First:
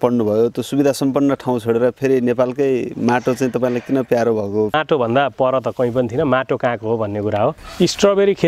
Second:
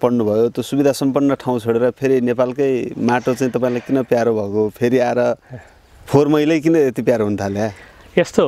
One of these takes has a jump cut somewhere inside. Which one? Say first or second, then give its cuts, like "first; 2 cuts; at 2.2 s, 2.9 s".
first; 2 cuts; at 4.8 s, 7.6 s